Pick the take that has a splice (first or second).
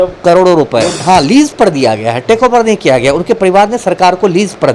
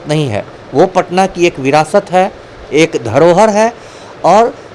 first